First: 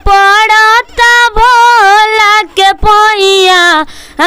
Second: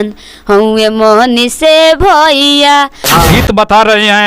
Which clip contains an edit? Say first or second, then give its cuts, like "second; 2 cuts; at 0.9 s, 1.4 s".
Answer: second; 1 cut; at 3.2 s